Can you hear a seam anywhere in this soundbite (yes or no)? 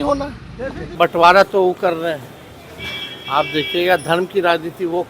yes